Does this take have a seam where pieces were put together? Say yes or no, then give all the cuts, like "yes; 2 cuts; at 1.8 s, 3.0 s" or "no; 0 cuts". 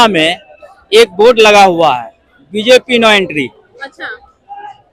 no; 0 cuts